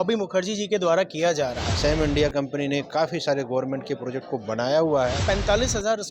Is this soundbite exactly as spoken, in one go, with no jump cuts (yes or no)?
no